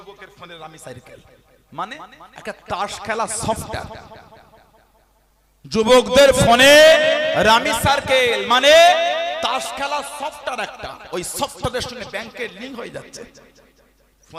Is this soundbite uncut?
yes; 0 cuts

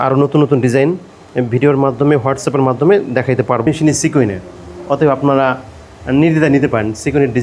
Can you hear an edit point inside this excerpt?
yes; 1 cut; at 3.7 s

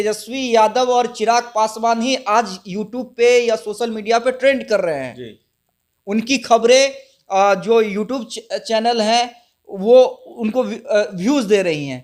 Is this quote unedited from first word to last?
yes; 0 cuts

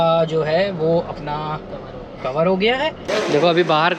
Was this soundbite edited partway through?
yes; 1 cut; at 3.0 s

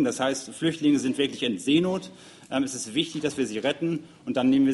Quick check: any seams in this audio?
no; 0 cuts

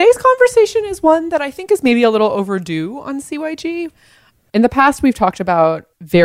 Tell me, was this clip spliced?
no; 0 cuts

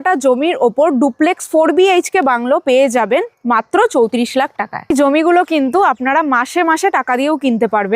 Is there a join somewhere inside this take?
yes; 1 cut; at 4.9 s

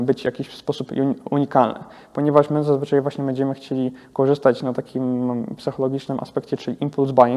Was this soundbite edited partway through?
no; 0 cuts

